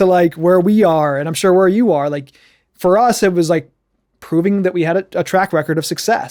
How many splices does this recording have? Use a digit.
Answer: 0